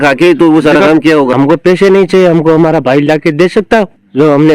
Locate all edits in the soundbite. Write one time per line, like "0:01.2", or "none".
0:01.3